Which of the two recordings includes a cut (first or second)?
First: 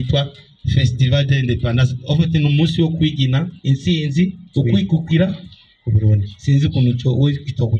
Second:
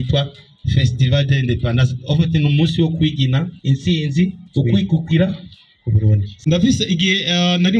second